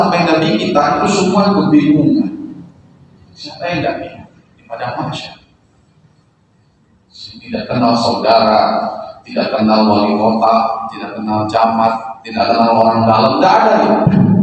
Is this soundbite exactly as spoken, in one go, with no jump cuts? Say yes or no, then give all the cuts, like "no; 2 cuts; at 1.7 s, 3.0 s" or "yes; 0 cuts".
yes; 0 cuts